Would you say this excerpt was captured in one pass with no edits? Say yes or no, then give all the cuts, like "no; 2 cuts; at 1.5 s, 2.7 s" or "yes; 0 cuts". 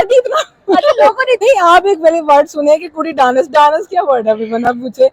no; 1 cut; at 1.4 s